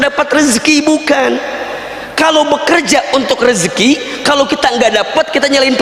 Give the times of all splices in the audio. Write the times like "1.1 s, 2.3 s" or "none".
none

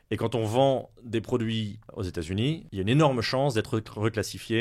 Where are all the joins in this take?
1.8 s, 2.7 s

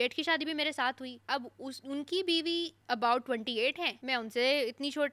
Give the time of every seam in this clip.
1.1 s, 2.8 s, 3.9 s

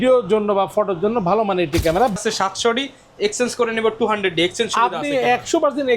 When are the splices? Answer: 2.1 s

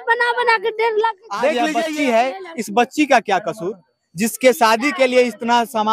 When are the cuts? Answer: 1.7 s

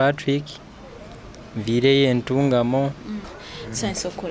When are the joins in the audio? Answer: 3.3 s

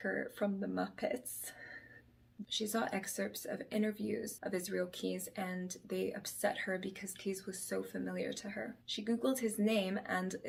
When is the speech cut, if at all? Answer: none

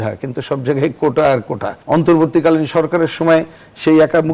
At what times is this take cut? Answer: 1.7 s

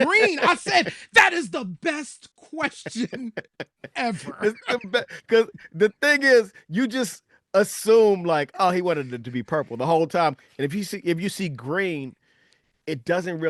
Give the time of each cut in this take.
10.4 s

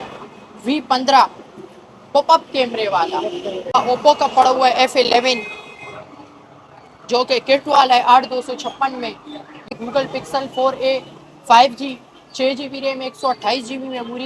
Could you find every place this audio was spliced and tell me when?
3.8 s, 9.7 s

